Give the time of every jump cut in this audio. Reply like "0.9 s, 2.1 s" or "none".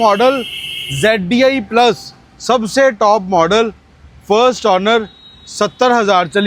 none